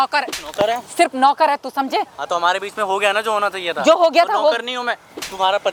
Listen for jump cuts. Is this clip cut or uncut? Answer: uncut